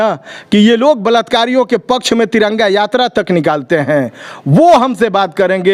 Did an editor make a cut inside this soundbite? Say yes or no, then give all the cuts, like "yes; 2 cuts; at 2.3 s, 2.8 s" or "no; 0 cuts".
no; 0 cuts